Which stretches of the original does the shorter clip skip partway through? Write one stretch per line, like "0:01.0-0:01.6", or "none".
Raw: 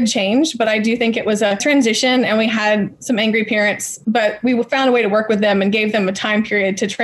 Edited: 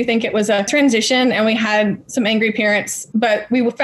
none